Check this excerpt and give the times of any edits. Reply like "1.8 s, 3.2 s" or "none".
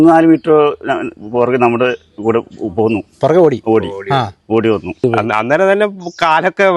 5.0 s